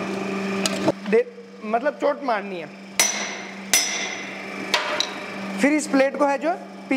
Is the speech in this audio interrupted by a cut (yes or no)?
yes